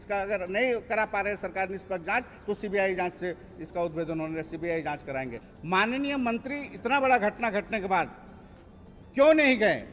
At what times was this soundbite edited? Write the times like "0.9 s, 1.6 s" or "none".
5.4 s